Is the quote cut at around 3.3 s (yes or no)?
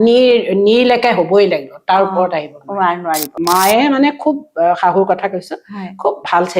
yes